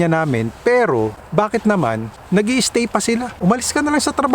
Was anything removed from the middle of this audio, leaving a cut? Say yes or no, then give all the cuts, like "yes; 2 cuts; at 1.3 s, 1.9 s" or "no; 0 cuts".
yes; 3 cuts; at 1.2 s, 2.1 s, 3.3 s